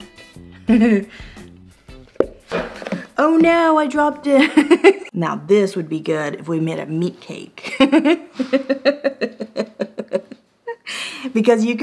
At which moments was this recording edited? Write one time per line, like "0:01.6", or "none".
0:05.0